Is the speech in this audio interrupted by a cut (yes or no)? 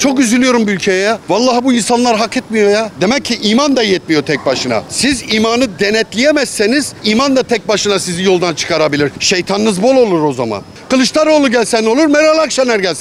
yes